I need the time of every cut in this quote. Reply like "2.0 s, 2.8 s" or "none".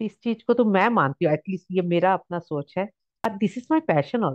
3.2 s